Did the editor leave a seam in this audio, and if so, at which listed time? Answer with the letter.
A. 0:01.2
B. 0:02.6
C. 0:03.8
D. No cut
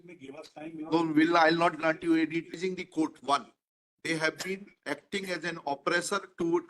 B